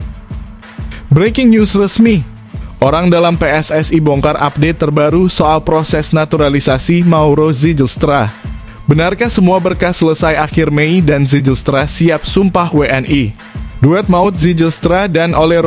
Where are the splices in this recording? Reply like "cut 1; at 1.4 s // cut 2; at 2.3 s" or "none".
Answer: cut 1; at 1.1 s